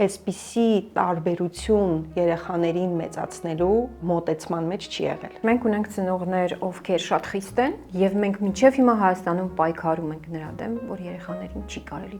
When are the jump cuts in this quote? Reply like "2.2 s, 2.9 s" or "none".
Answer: 4.0 s, 5.3 s